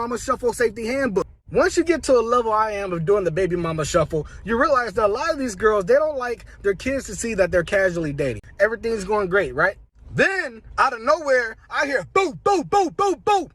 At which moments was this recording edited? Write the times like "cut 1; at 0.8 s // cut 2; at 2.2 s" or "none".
cut 1; at 1.4 s // cut 2; at 8.4 s